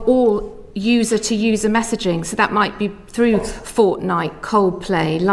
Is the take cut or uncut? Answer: uncut